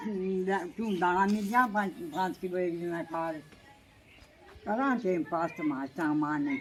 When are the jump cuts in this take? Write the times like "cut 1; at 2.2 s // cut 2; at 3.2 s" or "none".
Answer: none